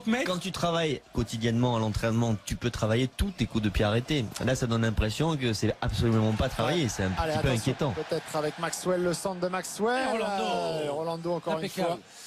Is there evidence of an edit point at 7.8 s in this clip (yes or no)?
yes